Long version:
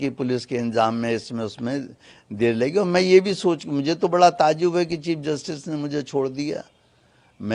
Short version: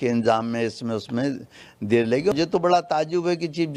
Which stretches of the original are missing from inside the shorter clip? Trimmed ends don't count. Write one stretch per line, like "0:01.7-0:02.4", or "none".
0:02.8-0:03.8